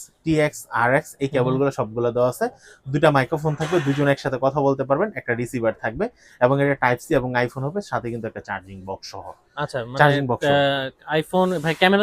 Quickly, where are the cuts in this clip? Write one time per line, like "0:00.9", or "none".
none